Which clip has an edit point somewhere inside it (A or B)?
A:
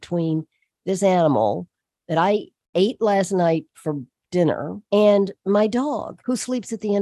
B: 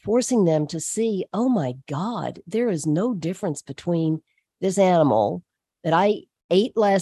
A